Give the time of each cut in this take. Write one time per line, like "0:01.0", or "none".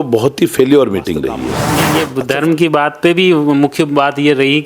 0:01.8